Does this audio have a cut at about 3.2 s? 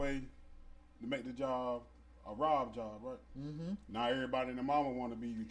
no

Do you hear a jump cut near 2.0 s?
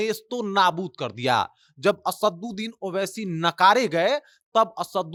no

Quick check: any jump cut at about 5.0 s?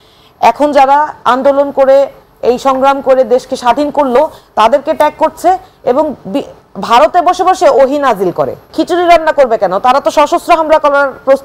no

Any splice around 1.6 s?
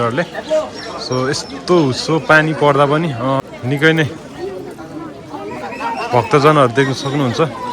no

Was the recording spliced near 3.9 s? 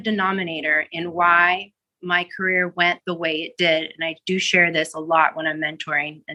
no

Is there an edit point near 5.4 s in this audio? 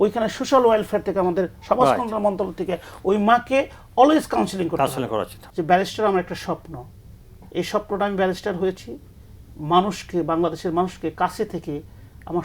yes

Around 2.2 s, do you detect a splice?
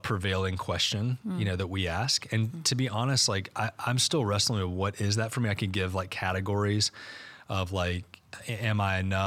no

